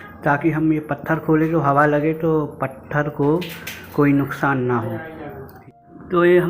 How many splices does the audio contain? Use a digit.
1